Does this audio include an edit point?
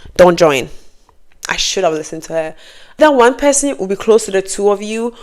yes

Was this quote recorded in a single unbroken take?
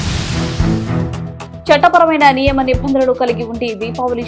no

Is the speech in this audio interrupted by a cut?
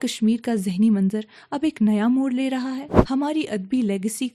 yes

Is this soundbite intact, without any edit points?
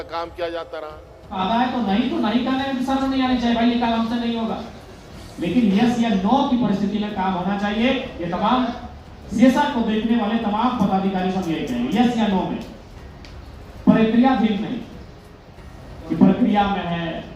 no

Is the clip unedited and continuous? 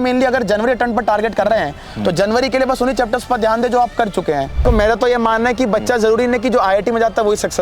no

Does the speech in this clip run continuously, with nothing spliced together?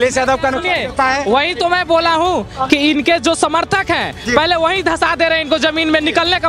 yes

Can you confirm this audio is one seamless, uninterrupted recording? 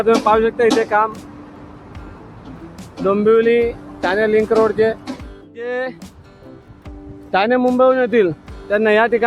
no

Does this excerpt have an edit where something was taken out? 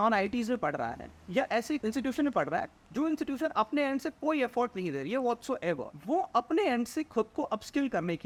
no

